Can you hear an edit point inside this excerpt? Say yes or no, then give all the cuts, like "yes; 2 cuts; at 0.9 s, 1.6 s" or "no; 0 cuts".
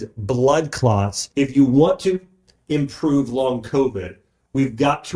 yes; 1 cut; at 1.2 s